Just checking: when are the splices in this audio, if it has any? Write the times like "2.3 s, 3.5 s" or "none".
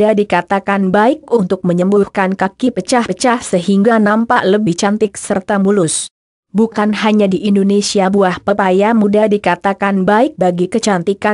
1.2 s